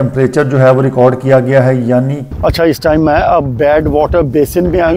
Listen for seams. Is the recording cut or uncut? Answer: cut